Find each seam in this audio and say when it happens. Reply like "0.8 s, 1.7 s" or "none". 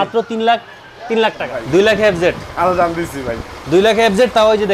1.5 s